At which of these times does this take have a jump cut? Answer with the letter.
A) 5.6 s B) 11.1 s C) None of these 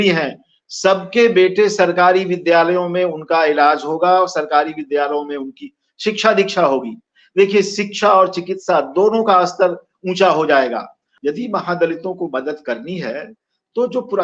B